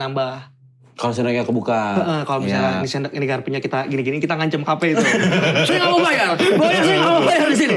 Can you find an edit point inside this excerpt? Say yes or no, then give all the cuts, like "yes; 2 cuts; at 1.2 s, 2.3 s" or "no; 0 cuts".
no; 0 cuts